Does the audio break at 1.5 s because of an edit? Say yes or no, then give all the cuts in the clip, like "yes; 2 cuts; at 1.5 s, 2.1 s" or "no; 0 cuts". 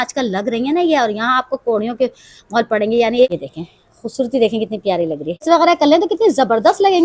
no; 2 cuts; at 3.3 s, 5.4 s